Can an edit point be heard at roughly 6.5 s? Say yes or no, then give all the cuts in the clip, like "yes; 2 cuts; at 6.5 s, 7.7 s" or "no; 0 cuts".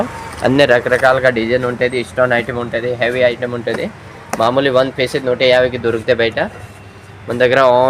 no; 0 cuts